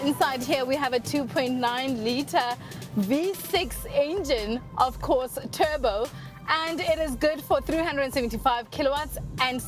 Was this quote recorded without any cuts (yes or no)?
yes